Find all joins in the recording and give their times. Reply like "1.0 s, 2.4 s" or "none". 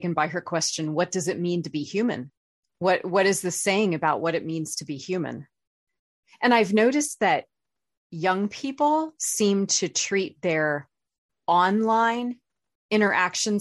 2.7 s